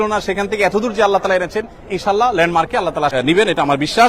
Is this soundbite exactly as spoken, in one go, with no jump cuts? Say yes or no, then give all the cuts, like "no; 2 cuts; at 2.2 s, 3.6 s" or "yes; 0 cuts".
no; 1 cut; at 3.1 s